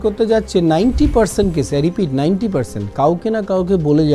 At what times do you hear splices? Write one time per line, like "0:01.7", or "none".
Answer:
none